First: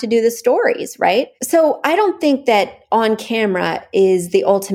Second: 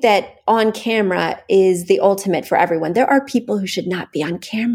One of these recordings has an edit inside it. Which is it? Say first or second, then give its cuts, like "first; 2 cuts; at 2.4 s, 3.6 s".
first; 1 cut; at 1.3 s